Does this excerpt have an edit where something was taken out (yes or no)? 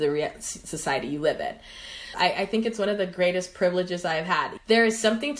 yes